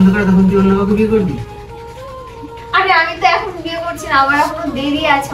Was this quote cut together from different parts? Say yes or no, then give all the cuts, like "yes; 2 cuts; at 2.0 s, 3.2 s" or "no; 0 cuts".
no; 0 cuts